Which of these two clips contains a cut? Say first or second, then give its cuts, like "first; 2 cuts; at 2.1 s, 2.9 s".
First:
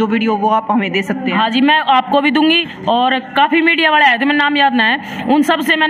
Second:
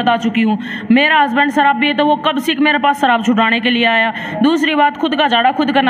first; 1 cut; at 2.7 s